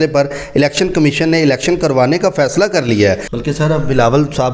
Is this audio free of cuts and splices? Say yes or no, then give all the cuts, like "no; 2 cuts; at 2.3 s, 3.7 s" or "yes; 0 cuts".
no; 1 cut; at 3.3 s